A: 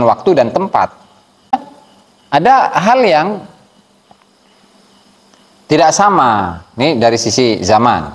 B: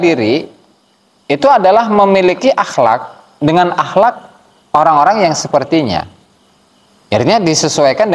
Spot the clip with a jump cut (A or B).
A